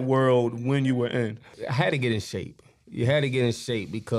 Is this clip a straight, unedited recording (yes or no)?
no